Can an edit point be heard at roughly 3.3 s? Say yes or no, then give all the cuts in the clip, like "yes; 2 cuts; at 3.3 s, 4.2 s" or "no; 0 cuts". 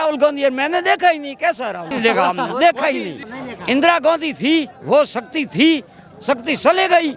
yes; 2 cuts; at 1.9 s, 3.3 s